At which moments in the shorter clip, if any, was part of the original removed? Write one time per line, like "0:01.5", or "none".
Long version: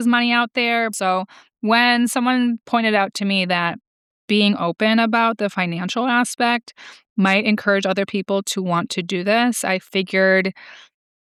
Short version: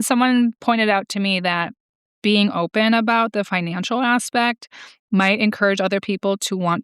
none